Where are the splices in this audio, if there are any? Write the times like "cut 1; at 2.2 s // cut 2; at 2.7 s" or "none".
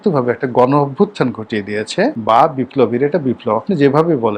cut 1; at 2.2 s